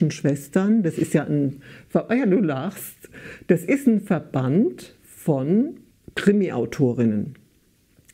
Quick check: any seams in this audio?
no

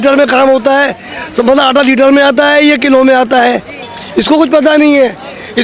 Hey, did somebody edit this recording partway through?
no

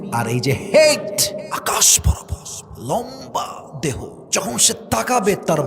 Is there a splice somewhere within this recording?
yes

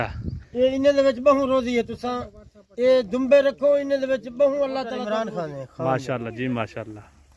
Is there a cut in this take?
yes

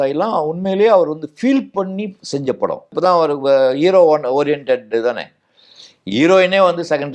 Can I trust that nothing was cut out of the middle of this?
no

